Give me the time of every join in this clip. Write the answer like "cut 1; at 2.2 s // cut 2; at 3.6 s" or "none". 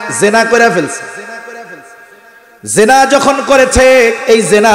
none